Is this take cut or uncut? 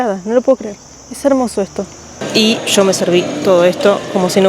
cut